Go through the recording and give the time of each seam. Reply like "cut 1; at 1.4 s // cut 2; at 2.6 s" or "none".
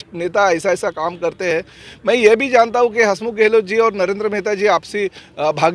none